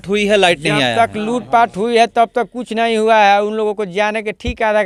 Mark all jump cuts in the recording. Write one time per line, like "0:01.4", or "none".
none